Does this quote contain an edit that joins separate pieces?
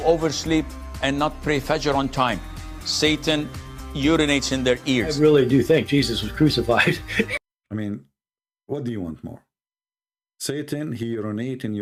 no; 0 cuts

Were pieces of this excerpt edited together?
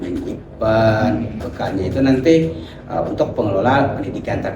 yes; 1 cut; at 1.4 s

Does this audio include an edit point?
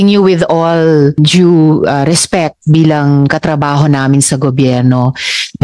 yes; 1 cut; at 1.1 s

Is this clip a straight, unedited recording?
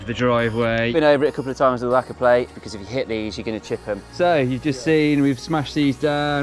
no; 3 cuts; at 0.9 s, 2.6 s, 4.1 s

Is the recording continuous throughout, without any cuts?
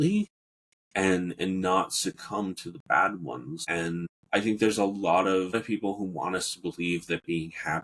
no; 2 cuts; at 3.8 s, 5.5 s

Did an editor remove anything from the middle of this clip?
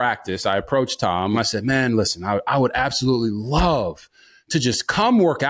yes; 1 cut; at 1.4 s

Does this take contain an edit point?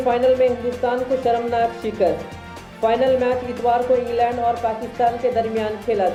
no; 0 cuts

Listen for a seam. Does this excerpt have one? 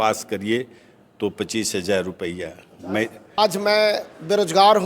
yes; 1 cut; at 3.2 s

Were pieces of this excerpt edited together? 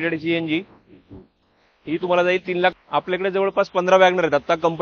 yes; 1 cut; at 2.7 s

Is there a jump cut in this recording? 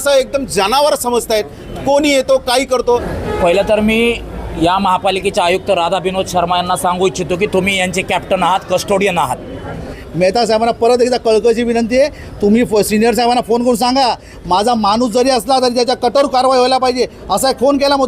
yes; 2 cuts; at 3.1 s, 10.0 s

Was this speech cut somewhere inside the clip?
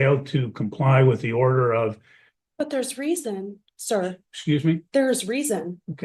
no; 0 cuts

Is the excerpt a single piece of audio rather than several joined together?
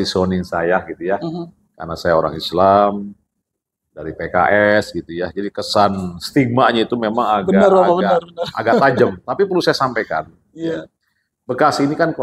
yes; 0 cuts

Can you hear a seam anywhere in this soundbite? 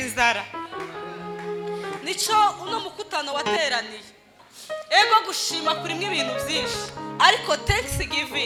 no; 0 cuts

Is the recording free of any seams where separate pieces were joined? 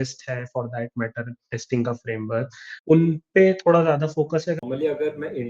no; 2 cuts; at 2.9 s, 4.6 s

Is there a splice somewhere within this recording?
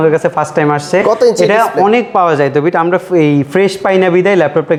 no; 0 cuts

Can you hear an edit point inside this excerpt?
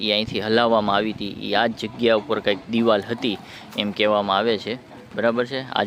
no; 0 cuts

